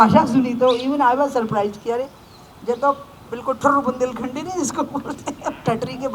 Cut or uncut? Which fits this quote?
uncut